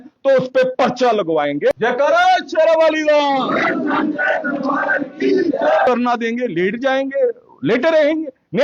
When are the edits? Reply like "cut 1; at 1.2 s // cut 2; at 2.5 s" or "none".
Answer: cut 1; at 2.1 s // cut 2; at 5.9 s